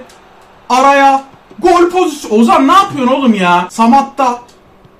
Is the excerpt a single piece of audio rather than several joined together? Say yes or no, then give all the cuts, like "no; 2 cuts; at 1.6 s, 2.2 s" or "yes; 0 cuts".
no; 1 cut; at 3.7 s